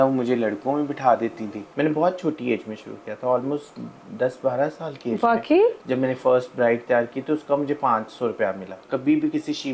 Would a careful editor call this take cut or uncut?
cut